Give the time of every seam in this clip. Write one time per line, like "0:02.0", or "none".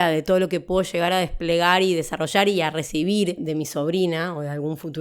0:03.4